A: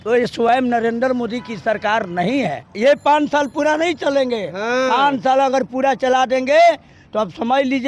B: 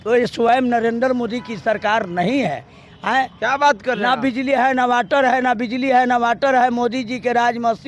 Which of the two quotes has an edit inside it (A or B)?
A